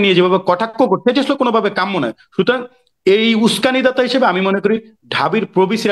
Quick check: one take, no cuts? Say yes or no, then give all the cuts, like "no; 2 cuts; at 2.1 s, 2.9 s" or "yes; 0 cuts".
yes; 0 cuts